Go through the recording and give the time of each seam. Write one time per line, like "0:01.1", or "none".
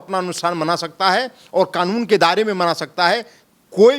none